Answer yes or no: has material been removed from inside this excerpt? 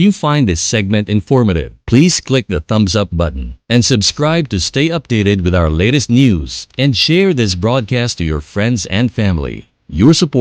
no